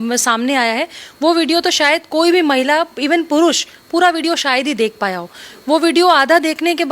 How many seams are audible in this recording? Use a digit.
0